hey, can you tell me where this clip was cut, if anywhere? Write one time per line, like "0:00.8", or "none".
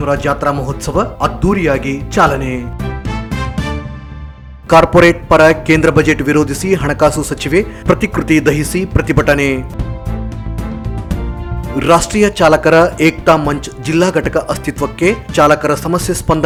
none

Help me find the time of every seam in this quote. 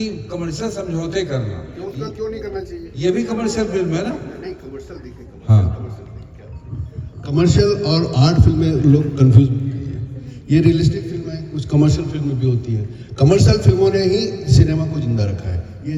none

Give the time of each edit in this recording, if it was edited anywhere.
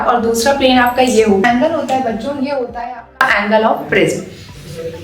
0:01.4

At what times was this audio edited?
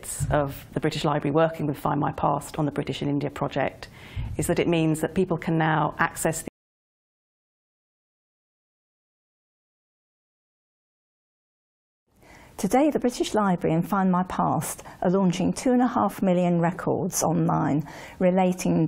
none

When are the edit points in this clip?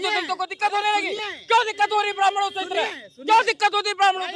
none

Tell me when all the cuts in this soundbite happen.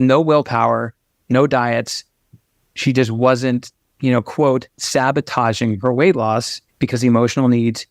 0:06.6

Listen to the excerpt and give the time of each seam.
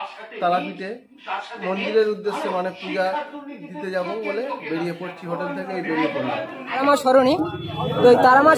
0:06.8

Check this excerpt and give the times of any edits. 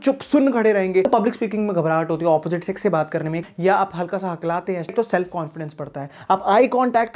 0:01.1
0:03.5
0:04.9

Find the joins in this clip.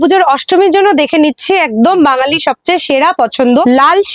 none

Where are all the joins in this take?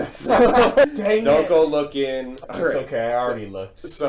0:00.9
0:02.3

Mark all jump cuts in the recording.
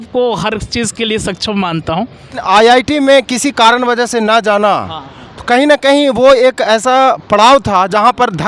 0:02.4

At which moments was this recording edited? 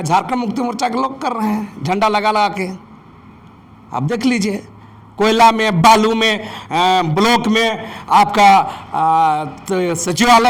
none

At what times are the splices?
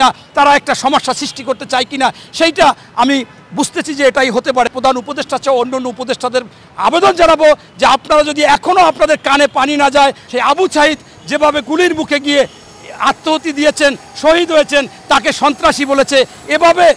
0:04.7
0:10.3

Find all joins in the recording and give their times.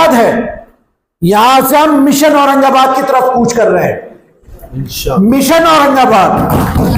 none

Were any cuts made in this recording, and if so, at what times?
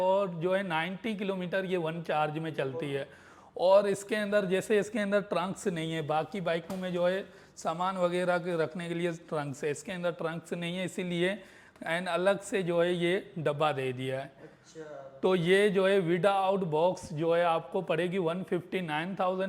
none

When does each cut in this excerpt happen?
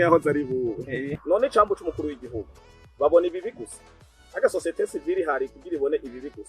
0:01.1

